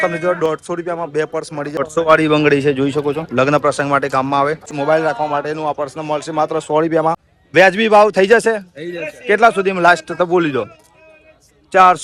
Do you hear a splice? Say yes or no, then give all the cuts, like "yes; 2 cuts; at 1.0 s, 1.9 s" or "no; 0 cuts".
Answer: yes; 3 cuts; at 1.8 s, 4.8 s, 7.3 s